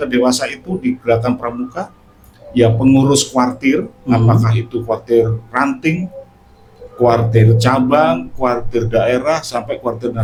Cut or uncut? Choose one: uncut